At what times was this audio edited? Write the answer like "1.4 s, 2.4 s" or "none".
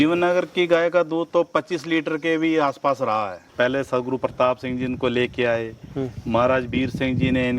3.4 s